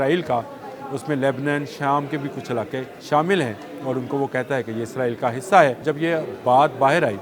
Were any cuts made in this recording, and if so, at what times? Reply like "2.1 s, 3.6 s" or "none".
2.9 s, 5.9 s